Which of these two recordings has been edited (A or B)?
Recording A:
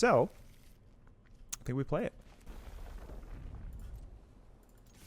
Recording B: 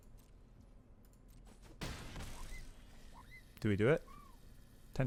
A